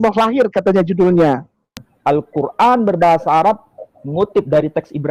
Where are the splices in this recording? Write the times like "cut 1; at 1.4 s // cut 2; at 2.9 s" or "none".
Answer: cut 1; at 1.9 s